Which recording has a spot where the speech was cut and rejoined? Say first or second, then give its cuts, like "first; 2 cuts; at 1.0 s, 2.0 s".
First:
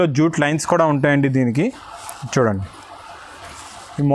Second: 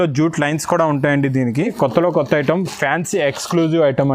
second; 1 cut; at 1.7 s